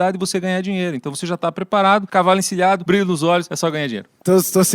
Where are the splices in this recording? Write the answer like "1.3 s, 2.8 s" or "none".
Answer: 2.1 s, 2.8 s, 3.6 s